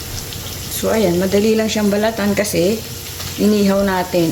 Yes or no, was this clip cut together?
no